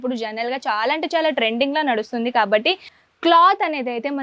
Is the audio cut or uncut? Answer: cut